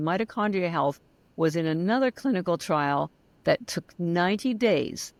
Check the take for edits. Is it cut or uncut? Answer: uncut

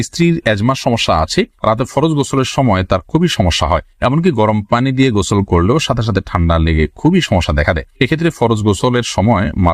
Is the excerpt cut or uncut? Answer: uncut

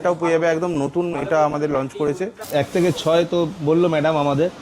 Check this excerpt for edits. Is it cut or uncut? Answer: cut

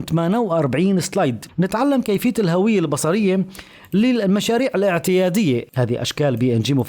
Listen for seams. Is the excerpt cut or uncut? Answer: cut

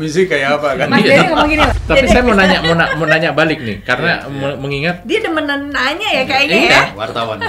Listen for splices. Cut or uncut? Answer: cut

